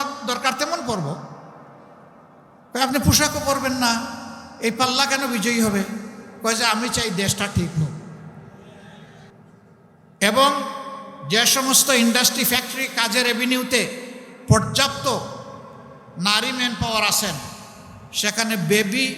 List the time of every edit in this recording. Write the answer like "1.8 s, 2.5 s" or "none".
9.8 s